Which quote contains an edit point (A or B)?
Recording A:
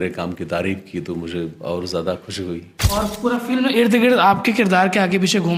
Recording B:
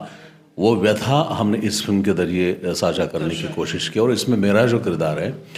A